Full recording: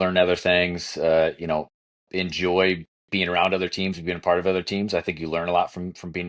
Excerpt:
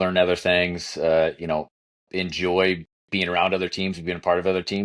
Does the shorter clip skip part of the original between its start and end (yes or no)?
no